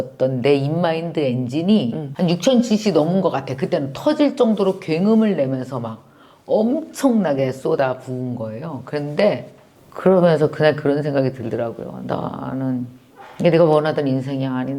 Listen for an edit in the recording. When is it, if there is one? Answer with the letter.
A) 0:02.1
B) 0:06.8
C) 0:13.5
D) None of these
A